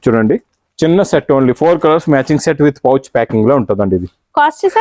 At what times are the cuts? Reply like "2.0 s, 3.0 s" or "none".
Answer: none